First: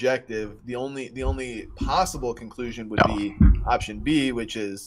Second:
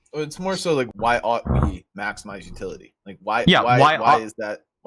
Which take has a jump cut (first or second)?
second